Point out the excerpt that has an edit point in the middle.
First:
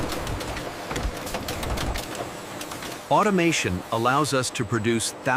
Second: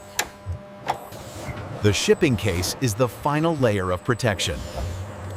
second; 1 cut; at 1.0 s

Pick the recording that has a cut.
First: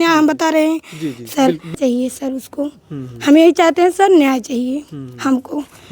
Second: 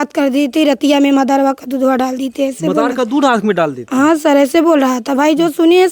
first; 1 cut; at 1.7 s

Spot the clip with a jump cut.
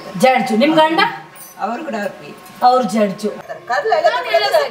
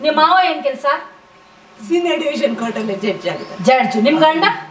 first; 1 cut; at 3.4 s

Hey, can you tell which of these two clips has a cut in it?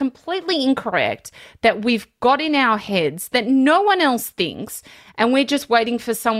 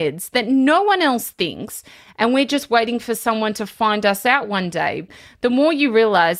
second; 1 cut; at 5.0 s

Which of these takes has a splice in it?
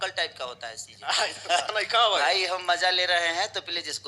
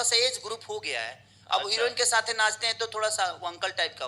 first; 1 cut; at 1.7 s

